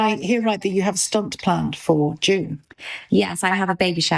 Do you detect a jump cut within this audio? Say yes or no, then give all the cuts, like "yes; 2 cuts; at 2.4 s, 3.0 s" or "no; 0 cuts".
no; 0 cuts